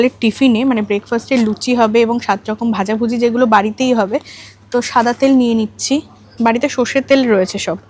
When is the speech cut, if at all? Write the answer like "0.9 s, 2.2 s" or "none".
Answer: none